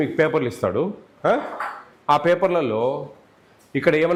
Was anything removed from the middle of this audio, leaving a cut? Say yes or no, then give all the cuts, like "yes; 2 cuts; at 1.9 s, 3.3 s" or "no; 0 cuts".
no; 0 cuts